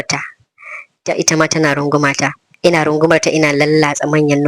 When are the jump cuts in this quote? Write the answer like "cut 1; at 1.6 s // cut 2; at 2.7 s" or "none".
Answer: cut 1; at 2.4 s